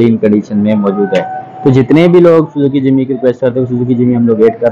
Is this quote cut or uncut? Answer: uncut